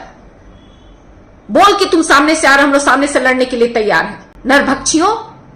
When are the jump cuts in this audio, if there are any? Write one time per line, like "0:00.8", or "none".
0:04.2